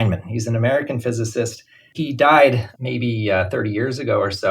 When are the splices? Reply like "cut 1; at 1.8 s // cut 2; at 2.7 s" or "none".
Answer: cut 1; at 1.9 s